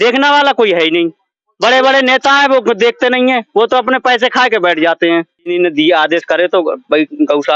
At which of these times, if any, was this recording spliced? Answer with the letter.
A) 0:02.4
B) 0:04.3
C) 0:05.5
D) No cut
C